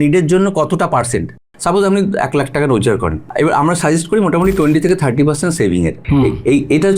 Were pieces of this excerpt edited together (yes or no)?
yes